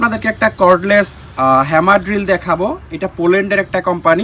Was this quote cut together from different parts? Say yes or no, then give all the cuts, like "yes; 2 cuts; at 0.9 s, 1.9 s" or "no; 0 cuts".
no; 0 cuts